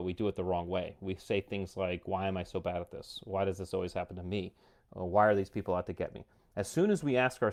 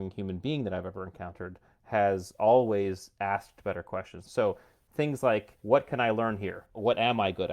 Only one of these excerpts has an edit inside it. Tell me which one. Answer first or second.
second